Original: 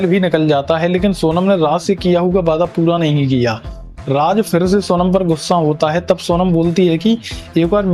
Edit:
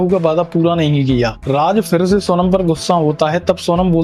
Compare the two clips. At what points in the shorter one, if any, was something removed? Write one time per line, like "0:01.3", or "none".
0:01.4